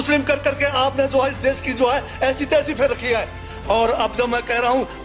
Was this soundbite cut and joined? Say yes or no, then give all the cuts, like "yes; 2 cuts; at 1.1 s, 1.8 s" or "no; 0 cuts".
no; 0 cuts